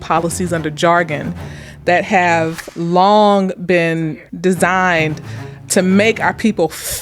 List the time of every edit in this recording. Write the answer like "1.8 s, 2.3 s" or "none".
2.6 s, 4.1 s, 5.5 s